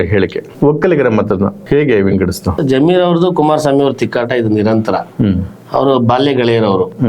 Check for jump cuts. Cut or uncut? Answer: cut